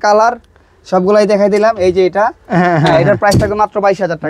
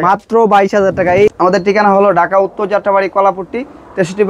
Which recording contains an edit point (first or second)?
second